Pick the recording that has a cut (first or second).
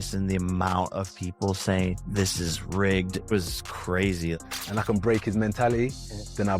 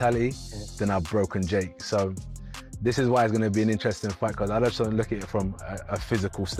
first